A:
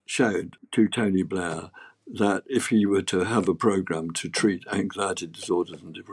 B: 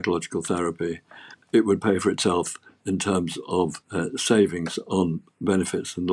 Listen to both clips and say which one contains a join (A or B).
B